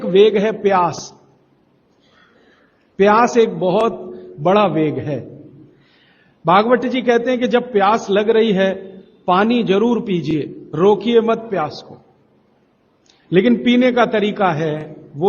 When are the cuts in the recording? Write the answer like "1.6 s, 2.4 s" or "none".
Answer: 1.0 s